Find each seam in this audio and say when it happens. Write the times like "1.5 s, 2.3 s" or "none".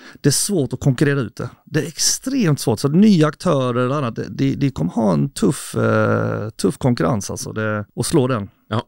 7.9 s

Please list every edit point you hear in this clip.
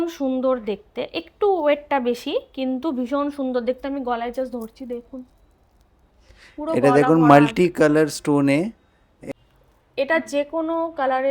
9.2 s

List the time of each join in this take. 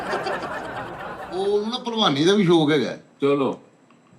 1.0 s

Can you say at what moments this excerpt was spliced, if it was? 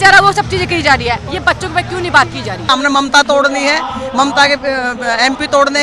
2.7 s

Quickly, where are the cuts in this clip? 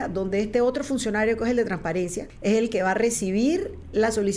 2.2 s

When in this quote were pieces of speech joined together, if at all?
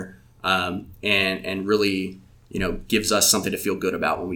none

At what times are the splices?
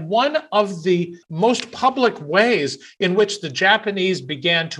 1.2 s

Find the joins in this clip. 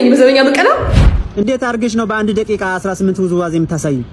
1.2 s

